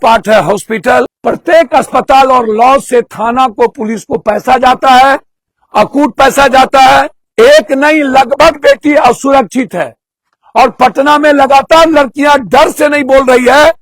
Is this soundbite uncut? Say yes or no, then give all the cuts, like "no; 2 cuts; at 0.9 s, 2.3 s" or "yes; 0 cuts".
no; 2 cuts; at 1.1 s, 7.2 s